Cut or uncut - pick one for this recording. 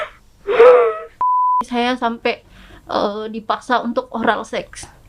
cut